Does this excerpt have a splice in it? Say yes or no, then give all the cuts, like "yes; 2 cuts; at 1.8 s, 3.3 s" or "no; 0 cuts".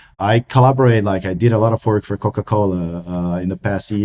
no; 0 cuts